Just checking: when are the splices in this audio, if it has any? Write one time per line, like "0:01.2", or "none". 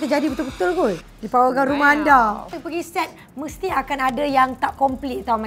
0:01.1
0:02.6